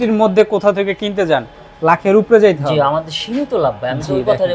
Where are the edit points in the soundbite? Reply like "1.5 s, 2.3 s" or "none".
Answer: none